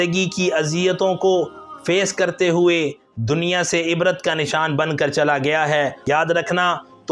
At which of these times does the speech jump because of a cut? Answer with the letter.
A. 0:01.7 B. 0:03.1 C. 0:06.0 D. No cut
C